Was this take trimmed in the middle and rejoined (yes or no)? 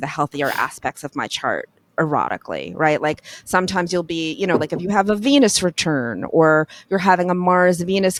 no